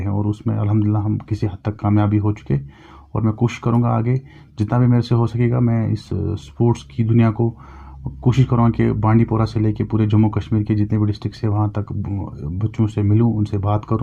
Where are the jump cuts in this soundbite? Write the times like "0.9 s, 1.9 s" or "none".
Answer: none